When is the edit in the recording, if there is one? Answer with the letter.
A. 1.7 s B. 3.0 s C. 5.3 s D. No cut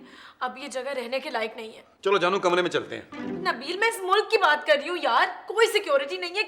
D